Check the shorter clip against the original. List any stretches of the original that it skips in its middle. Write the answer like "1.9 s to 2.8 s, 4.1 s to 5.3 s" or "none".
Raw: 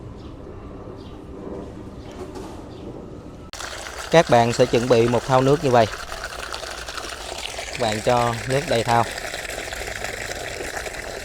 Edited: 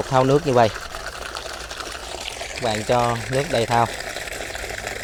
none